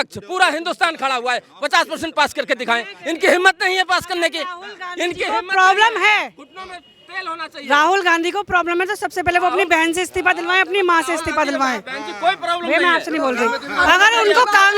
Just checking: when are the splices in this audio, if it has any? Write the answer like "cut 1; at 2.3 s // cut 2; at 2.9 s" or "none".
none